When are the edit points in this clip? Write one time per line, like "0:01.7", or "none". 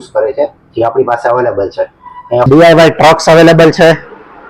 0:02.5